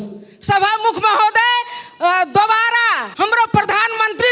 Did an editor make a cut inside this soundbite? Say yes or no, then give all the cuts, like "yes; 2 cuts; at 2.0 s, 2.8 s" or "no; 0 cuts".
yes; 1 cut; at 3.0 s